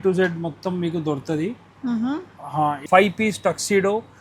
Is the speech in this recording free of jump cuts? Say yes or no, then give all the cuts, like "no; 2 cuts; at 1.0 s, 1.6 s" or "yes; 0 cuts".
no; 1 cut; at 2.8 s